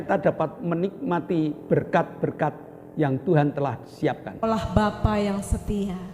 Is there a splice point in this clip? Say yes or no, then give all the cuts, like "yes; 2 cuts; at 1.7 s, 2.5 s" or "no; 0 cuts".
yes; 1 cut; at 4.4 s